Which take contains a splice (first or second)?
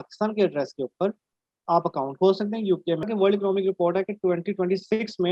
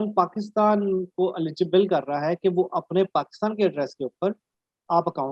first